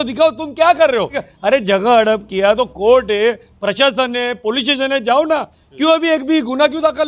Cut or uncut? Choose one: cut